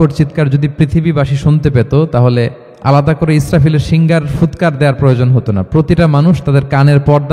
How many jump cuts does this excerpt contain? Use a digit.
1